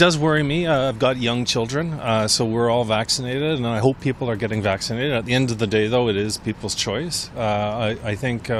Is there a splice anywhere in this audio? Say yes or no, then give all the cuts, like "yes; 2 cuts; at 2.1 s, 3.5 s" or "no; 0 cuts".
no; 0 cuts